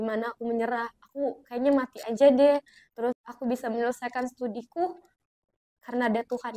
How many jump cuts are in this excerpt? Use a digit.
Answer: 1